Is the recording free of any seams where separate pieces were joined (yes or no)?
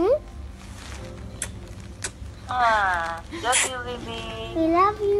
no